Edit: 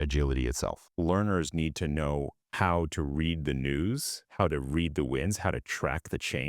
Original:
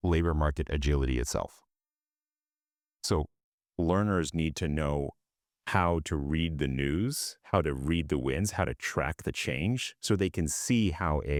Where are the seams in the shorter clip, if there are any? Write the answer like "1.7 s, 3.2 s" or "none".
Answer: 0.8 s, 2.4 s